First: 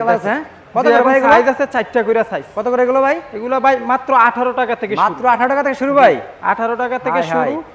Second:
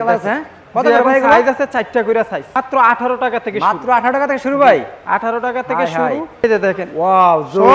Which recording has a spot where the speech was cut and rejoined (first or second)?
second